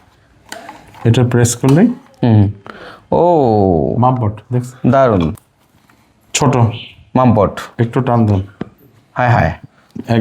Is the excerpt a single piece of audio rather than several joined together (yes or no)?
no